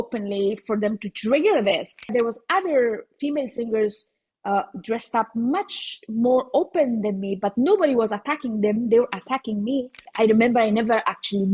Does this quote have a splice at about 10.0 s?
yes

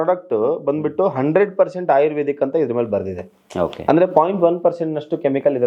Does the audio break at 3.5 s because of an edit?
no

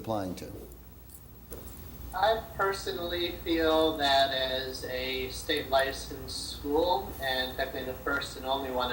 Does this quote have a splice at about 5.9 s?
yes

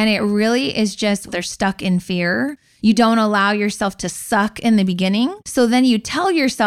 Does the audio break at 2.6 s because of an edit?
yes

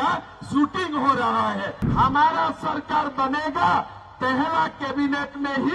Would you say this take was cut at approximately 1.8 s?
yes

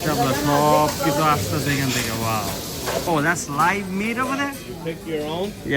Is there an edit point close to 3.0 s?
yes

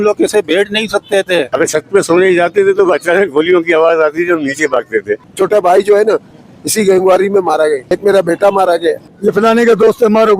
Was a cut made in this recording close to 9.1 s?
yes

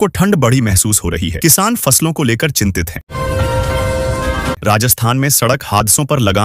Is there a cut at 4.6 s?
yes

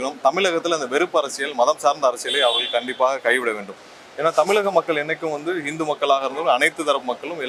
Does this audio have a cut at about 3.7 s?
no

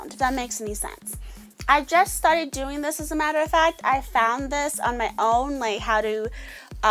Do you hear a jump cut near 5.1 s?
yes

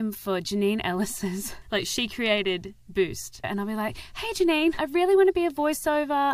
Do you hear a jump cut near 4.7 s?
no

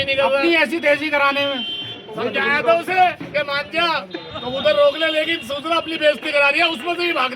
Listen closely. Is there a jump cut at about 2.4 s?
yes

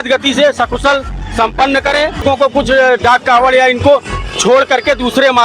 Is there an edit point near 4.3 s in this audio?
no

